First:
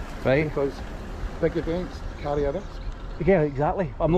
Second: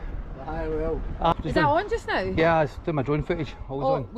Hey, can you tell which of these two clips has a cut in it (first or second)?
second